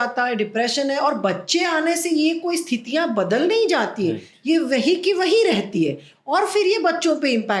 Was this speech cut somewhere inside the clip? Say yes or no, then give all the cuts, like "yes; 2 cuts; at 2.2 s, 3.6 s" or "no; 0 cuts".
no; 0 cuts